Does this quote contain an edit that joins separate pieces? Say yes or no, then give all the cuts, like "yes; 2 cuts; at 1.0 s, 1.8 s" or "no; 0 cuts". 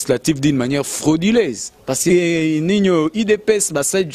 yes; 1 cut; at 2.1 s